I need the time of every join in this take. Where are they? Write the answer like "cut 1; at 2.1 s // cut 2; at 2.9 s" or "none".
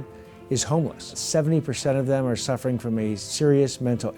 cut 1; at 1.2 s // cut 2; at 3.3 s